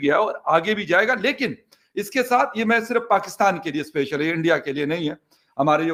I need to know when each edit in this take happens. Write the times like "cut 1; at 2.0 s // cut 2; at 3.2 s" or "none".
none